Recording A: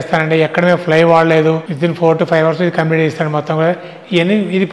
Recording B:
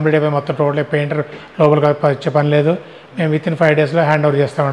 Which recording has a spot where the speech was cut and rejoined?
A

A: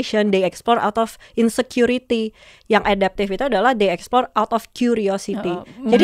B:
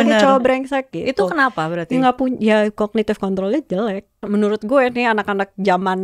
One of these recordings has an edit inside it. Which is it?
B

